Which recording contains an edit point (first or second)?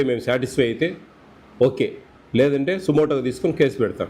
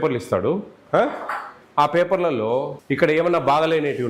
second